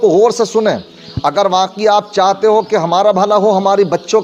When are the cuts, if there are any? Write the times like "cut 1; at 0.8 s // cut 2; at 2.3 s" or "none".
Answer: none